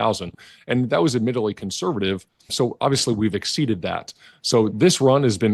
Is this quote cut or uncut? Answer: cut